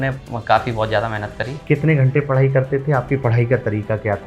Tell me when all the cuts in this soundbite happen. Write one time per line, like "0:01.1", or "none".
0:01.6